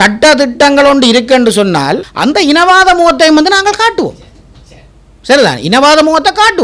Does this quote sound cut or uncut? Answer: cut